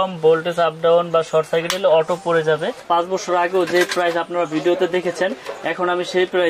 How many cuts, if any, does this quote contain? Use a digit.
1